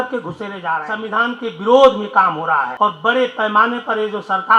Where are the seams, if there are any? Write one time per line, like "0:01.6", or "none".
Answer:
0:00.9
0:02.7